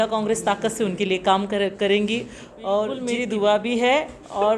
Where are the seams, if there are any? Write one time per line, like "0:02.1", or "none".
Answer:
0:03.0